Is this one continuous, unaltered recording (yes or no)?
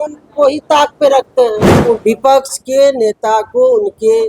no